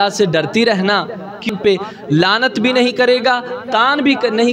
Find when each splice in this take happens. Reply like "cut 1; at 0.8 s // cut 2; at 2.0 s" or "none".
cut 1; at 1.5 s